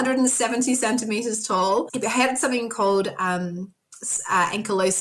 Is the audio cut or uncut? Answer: uncut